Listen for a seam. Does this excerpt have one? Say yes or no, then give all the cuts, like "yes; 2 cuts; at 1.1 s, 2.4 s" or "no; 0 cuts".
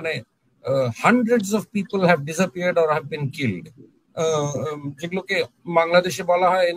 no; 0 cuts